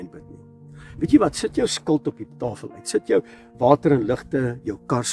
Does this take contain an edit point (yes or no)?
no